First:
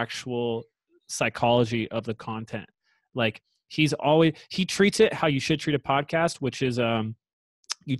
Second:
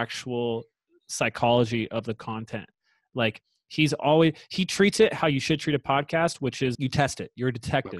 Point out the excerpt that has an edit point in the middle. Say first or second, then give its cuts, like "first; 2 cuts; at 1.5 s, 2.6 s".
second; 1 cut; at 6.7 s